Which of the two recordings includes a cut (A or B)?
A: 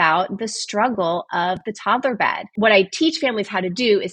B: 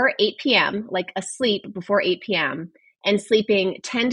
A